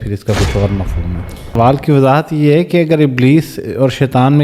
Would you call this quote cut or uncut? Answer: cut